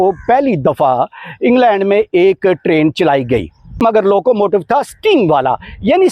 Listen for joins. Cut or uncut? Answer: cut